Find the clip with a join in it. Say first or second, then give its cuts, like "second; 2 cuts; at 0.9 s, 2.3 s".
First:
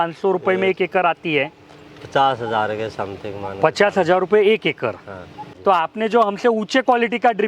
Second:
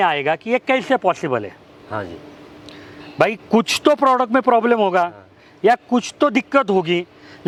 first; 1 cut; at 5.4 s